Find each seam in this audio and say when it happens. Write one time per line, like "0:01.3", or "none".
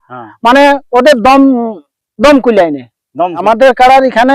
0:03.4